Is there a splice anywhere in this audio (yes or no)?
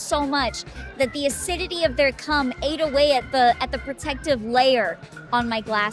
no